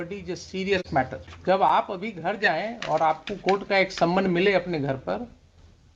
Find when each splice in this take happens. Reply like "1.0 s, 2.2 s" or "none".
1.3 s